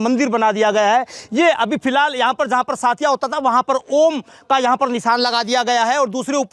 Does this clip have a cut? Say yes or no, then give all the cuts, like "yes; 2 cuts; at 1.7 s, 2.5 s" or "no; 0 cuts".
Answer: no; 0 cuts